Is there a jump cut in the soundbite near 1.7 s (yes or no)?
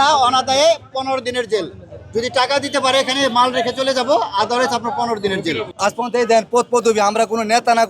no